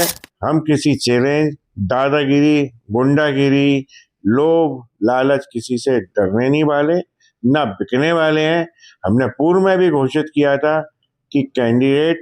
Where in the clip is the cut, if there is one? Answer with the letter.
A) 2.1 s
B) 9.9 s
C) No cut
C